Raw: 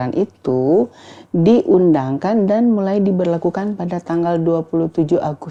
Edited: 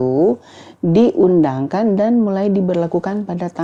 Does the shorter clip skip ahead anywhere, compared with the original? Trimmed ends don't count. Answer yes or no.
no